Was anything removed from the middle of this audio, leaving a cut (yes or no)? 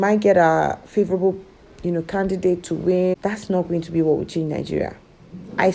yes